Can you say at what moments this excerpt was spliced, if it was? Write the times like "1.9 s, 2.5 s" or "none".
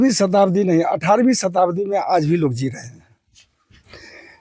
none